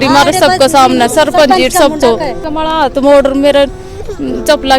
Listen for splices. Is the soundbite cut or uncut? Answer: cut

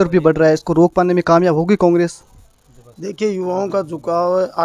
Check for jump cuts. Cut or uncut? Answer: uncut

